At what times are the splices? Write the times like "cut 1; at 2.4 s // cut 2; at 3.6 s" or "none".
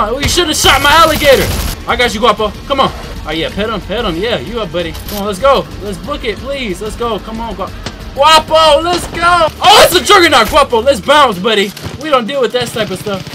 cut 1; at 1.7 s // cut 2; at 3.1 s // cut 3; at 5.0 s // cut 4; at 9.5 s